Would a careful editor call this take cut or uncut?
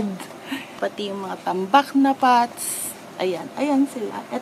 uncut